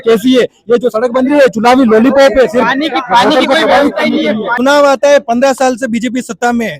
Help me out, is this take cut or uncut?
cut